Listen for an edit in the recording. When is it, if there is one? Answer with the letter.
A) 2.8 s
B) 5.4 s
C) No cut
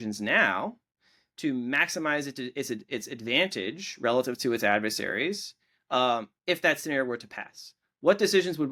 C